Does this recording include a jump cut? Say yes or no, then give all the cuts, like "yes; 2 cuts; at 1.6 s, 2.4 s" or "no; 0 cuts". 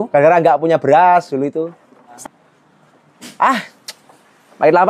yes; 1 cut; at 2.2 s